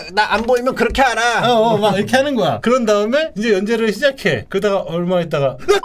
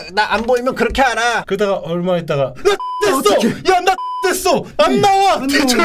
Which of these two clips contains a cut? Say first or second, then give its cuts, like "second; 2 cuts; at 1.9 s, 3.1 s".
second; 2 cuts; at 1.4 s, 4.7 s